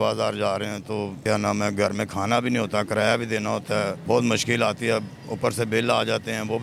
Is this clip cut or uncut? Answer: uncut